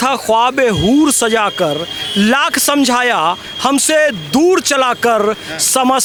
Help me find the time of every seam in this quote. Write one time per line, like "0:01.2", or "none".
none